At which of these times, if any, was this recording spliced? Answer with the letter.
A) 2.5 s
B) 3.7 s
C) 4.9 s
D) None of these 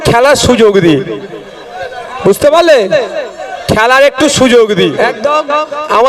C